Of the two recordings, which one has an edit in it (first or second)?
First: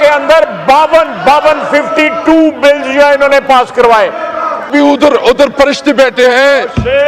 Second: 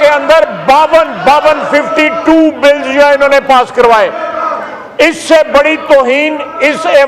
first